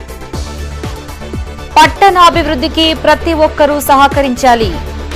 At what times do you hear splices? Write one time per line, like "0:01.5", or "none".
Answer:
0:01.4